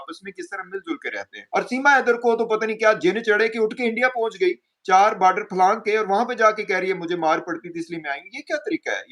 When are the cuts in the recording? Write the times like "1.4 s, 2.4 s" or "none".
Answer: 1.4 s